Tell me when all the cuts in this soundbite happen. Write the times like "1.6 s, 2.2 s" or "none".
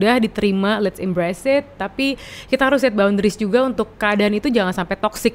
none